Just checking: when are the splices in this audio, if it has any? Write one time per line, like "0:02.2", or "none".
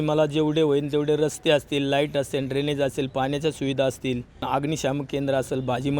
0:04.4